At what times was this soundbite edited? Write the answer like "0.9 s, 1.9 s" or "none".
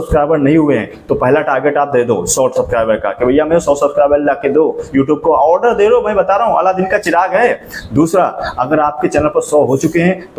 none

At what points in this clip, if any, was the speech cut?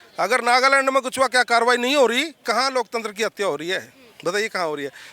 2.4 s

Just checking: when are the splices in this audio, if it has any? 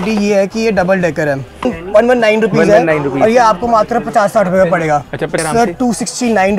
1.7 s, 5.3 s

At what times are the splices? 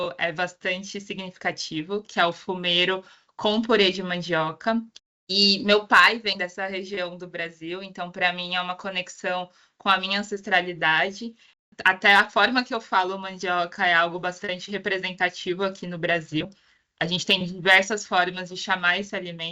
4.9 s, 11.6 s

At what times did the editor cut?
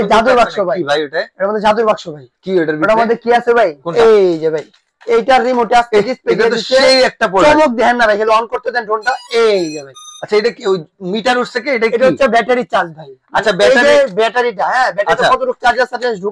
4.0 s

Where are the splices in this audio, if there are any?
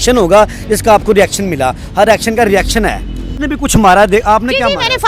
3.4 s

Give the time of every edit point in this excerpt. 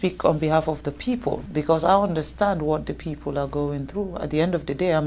1.4 s

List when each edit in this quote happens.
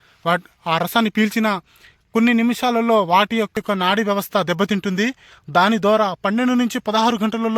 3.5 s

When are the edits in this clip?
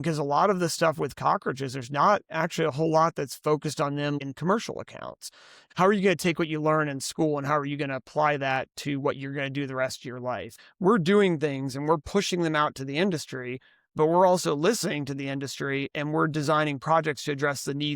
4.2 s, 5.6 s, 10.6 s

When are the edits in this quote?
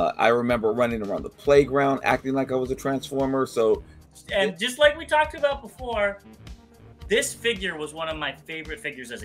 4.1 s

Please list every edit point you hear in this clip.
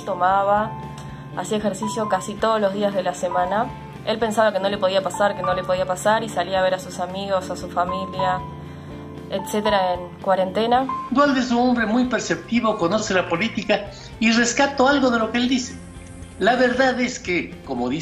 3.9 s, 11.0 s

